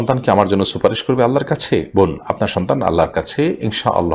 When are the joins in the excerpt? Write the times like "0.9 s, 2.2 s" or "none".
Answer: none